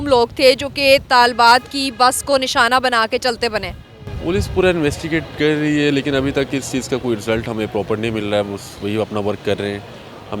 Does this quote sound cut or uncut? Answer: uncut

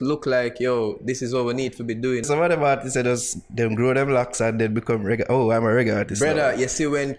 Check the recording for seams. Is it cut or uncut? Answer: cut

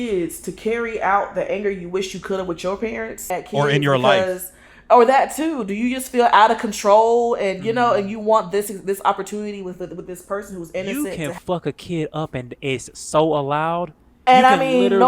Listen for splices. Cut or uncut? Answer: cut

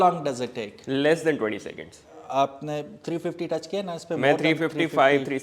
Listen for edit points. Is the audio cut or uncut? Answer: cut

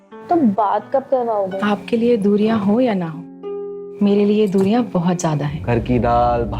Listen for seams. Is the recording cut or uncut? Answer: cut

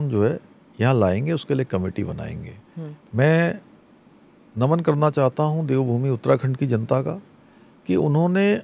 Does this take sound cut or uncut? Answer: uncut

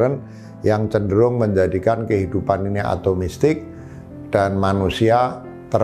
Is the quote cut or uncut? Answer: uncut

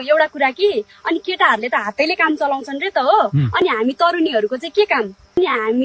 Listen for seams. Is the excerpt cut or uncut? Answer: uncut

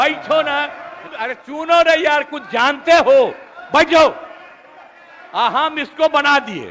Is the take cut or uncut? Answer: cut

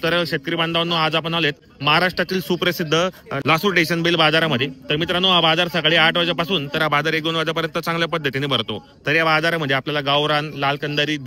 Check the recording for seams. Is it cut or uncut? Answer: cut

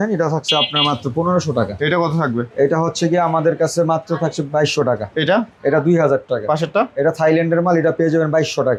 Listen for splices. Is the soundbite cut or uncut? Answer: uncut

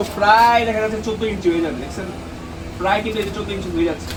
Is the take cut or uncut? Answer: uncut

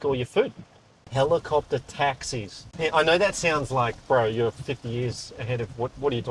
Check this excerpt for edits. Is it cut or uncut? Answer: cut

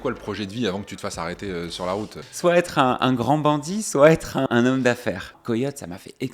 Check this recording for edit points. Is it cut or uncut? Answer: cut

